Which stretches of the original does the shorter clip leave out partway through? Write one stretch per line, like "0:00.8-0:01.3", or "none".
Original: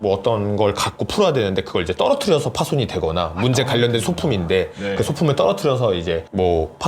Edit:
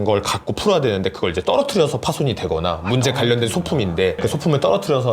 0:04.7-0:04.9